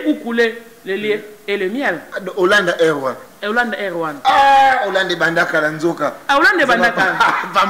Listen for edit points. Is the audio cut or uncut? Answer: uncut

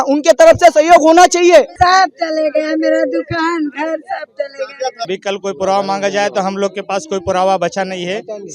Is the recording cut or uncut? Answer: cut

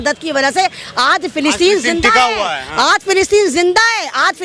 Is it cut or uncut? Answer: uncut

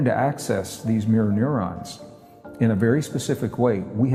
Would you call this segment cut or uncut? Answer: uncut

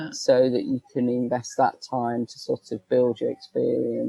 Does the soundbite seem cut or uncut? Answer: uncut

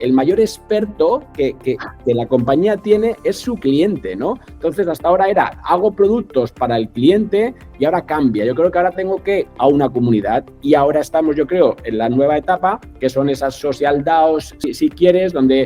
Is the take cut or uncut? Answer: cut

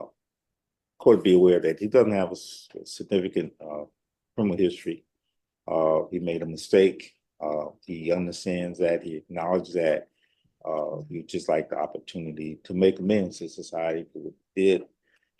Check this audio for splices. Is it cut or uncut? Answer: uncut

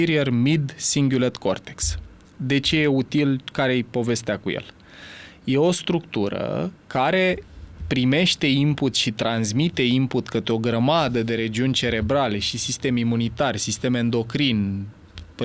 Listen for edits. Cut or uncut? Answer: uncut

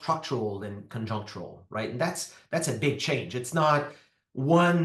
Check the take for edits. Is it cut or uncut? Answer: uncut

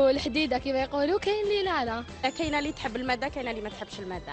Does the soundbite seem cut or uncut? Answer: uncut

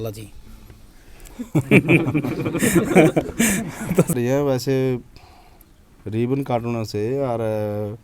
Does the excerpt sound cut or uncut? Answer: cut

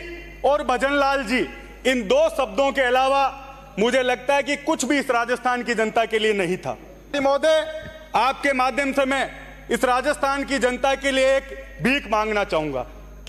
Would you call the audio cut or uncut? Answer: cut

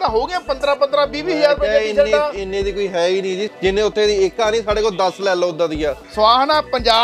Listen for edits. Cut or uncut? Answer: cut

